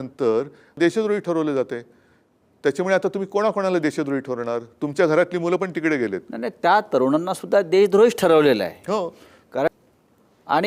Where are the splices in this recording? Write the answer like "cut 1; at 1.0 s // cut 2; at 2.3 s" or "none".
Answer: cut 1; at 9.7 s